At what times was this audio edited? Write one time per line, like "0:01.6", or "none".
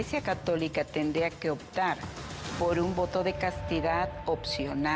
none